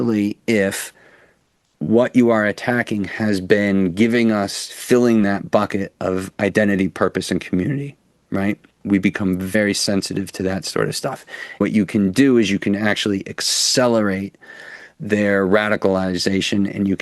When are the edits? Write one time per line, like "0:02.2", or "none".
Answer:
0:09.5
0:11.6